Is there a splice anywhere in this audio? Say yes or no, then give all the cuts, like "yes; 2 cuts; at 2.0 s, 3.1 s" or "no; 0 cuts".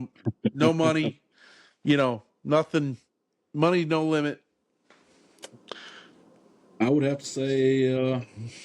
no; 0 cuts